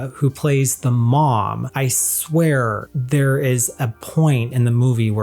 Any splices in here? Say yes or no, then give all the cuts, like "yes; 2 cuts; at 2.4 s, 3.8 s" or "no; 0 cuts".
yes; 2 cuts; at 1.6 s, 2.9 s